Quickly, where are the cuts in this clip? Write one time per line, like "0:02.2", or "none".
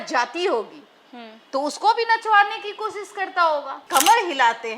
0:03.8

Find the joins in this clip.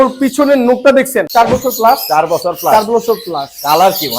0:01.3

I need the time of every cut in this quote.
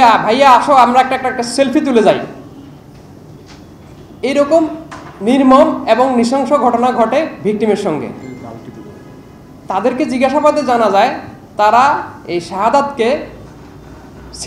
none

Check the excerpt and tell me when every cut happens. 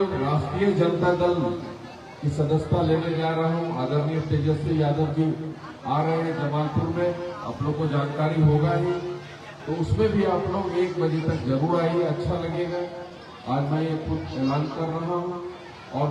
none

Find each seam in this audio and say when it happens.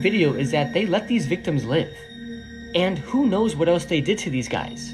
none

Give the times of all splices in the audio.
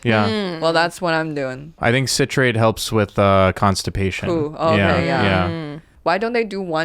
0:01.8
0:05.8

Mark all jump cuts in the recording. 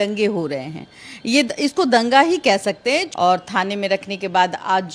0:03.1

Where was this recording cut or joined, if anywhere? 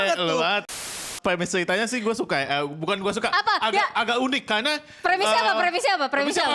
0:01.0

